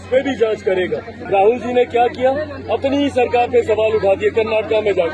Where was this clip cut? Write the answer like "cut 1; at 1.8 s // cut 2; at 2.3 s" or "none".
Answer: cut 1; at 1.2 s